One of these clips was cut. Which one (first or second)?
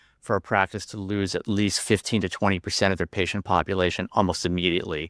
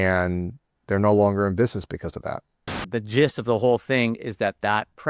second